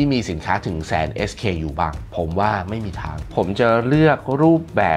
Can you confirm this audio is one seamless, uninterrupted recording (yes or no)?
no